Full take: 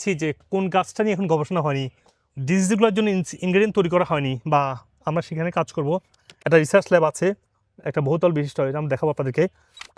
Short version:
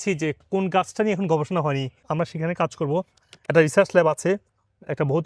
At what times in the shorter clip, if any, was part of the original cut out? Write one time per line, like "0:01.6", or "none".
0:02.0

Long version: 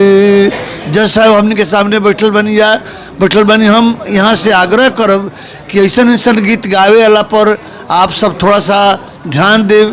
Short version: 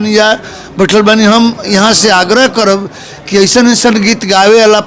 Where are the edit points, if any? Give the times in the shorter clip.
none

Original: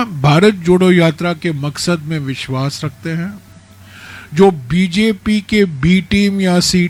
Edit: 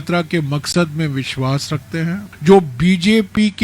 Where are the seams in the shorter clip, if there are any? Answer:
0:02.3

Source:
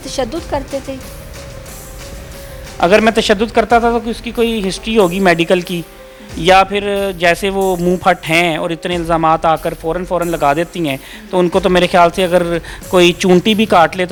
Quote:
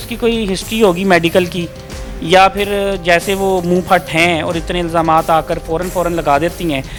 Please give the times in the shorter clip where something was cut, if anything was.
none

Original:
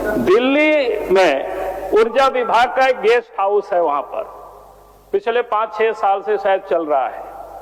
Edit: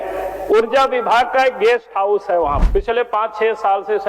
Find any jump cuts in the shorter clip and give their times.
0:02.6

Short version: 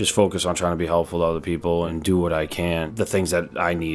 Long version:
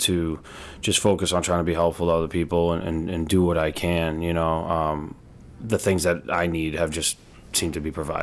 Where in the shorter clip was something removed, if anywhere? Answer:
0:01.9
0:02.9

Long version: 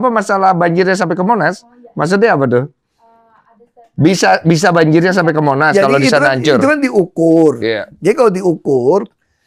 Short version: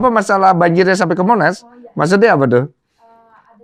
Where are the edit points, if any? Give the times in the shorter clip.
none

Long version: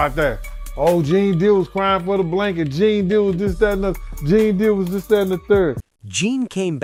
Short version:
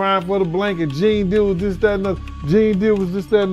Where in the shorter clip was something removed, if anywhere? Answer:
none

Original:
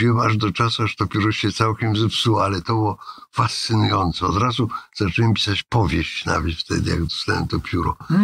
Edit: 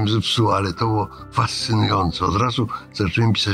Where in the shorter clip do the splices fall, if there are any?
0:01.2

